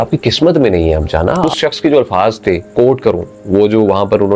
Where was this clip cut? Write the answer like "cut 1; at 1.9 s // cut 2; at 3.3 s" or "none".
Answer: cut 1; at 1.5 s

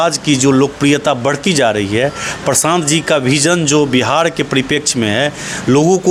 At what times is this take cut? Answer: none

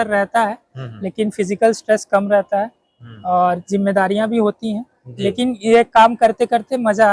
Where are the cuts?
none

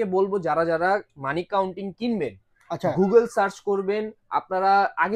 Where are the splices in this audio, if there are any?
none

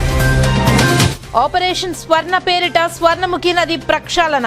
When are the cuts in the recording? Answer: cut 1; at 1.2 s

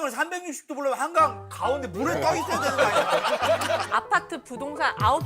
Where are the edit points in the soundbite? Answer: cut 1; at 3.9 s

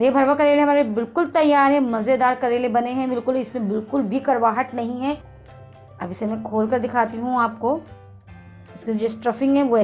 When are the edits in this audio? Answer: cut 1; at 5.3 s

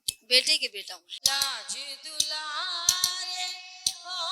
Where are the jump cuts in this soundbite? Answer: cut 1; at 1.0 s

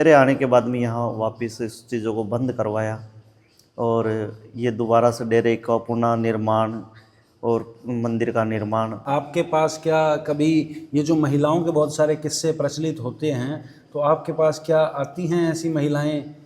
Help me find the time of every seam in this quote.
cut 1; at 9.0 s

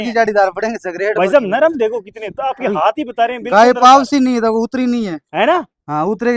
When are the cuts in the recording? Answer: none

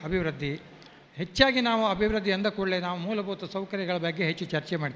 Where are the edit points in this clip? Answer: cut 1; at 1.1 s

